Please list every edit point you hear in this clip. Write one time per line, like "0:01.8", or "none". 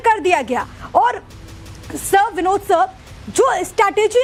none